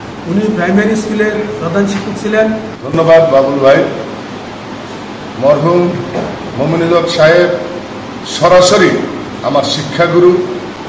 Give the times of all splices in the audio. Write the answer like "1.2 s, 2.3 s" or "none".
2.8 s